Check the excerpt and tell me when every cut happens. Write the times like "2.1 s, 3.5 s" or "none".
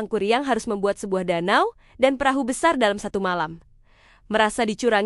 3.6 s